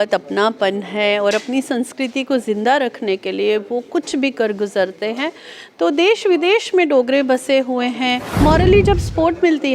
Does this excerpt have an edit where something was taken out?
yes; 1 cut; at 8.3 s

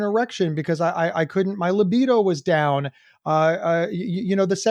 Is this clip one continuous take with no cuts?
yes; 0 cuts

